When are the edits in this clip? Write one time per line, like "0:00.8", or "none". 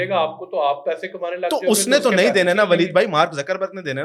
none

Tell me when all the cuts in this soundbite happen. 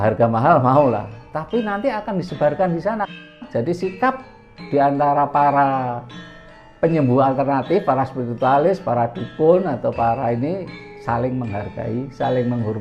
0:03.3

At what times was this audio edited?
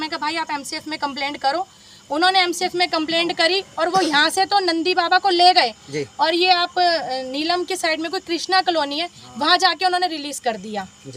none

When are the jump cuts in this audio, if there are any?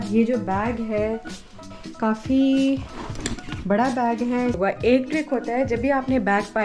0:01.8
0:04.6

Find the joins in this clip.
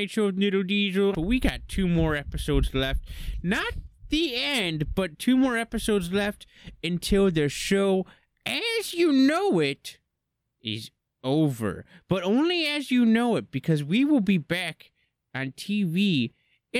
0:01.2

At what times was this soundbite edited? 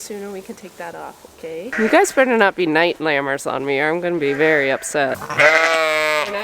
0:01.7
0:05.2

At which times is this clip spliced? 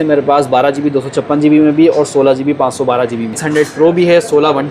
0:03.4

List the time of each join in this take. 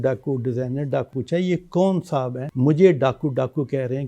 0:01.1
0:02.4

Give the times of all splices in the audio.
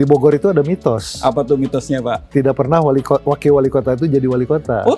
none

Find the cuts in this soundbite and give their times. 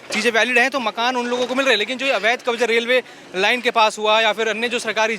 none

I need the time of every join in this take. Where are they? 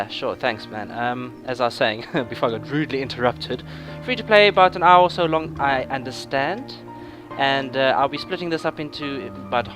0:07.2

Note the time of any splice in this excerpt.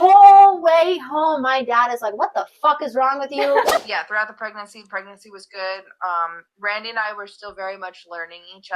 0:03.8

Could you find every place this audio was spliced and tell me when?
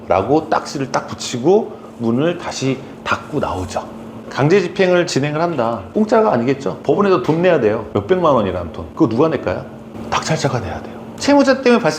0:05.8
0:06.7
0:07.8
0:08.8
0:11.1

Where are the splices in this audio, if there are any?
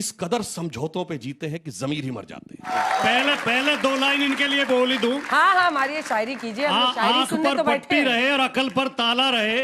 0:02.7

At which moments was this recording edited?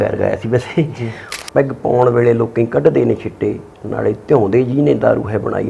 0:01.3

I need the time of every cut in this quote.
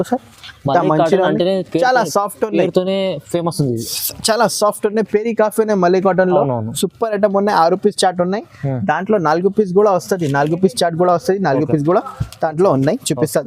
none

